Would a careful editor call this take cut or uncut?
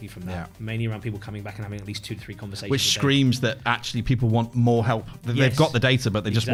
uncut